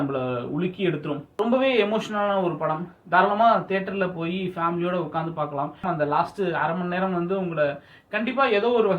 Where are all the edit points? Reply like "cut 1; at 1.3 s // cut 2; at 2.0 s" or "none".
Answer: cut 1; at 1.3 s // cut 2; at 5.8 s